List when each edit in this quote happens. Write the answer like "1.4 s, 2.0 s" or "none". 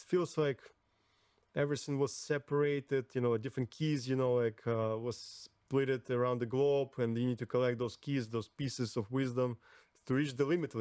none